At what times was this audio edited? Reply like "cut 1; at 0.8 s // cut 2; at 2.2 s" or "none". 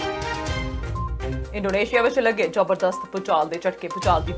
cut 1; at 1.4 s